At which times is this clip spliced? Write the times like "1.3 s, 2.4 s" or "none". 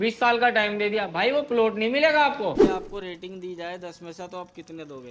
2.6 s